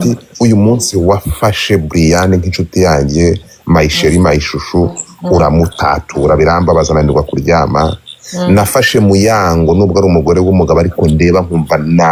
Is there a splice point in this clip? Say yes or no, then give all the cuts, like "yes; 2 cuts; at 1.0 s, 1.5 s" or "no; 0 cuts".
no; 0 cuts